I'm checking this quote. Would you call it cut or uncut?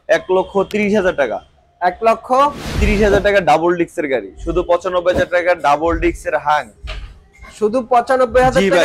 cut